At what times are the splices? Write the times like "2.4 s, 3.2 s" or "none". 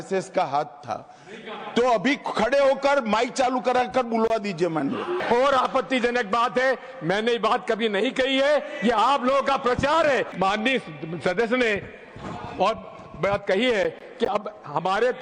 5.2 s, 10.3 s